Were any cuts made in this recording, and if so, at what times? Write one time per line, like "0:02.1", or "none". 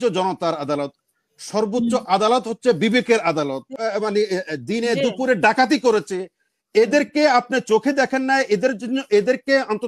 0:03.7